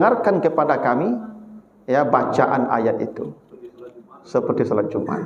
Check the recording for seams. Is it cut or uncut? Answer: uncut